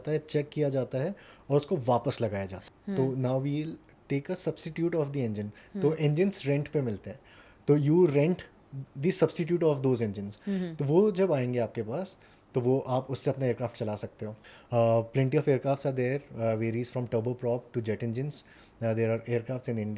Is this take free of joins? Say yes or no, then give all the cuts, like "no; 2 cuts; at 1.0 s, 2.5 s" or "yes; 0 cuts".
no; 2 cuts; at 2.6 s, 14.3 s